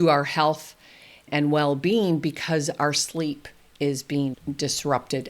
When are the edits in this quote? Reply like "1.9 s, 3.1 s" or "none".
4.4 s